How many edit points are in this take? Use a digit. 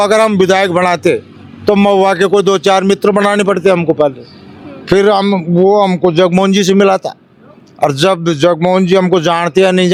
0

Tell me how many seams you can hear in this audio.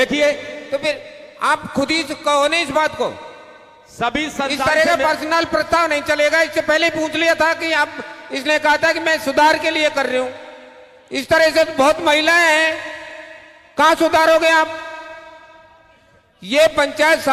0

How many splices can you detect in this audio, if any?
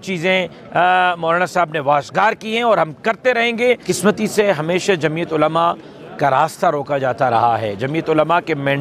1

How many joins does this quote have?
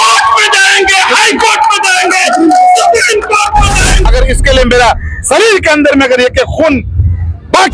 1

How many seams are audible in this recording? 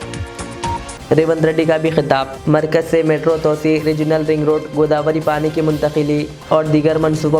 1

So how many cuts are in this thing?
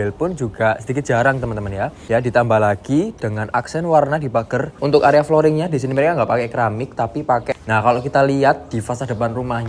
3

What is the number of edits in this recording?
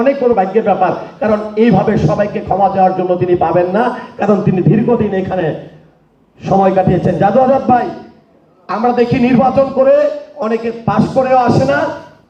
0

